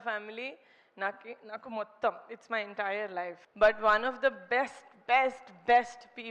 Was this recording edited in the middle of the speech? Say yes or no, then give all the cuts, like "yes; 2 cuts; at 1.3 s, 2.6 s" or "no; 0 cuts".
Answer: yes; 1 cut; at 3.4 s